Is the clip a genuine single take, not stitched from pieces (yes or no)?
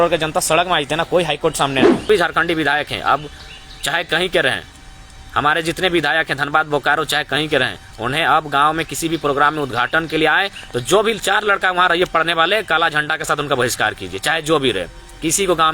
no